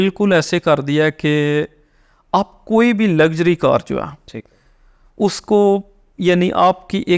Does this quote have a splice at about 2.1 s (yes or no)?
no